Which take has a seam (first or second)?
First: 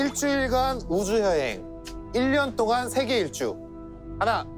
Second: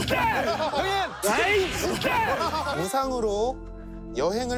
second